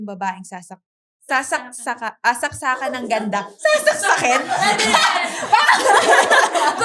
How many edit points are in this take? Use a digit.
0